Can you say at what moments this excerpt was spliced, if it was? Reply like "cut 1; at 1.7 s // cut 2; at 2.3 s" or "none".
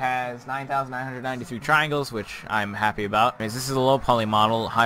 cut 1; at 3.4 s